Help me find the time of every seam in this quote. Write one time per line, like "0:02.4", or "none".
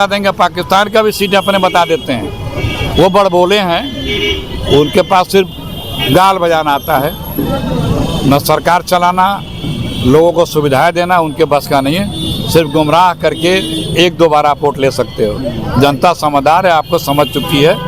none